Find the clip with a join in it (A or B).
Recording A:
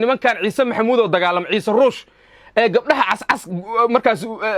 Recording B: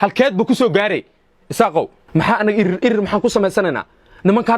B